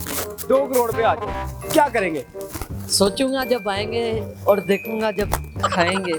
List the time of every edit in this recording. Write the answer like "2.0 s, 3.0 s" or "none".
none